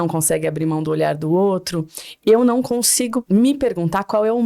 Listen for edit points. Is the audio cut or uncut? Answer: cut